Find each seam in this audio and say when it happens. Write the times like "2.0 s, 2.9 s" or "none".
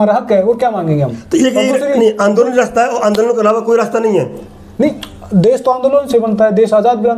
1.2 s